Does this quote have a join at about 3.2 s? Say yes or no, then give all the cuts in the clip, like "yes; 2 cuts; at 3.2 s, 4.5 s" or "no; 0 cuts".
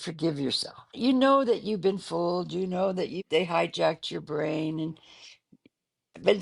yes; 2 cuts; at 0.9 s, 3.2 s